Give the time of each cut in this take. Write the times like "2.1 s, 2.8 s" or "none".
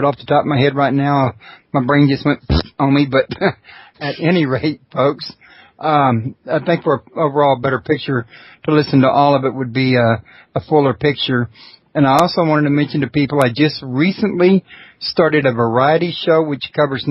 2.2 s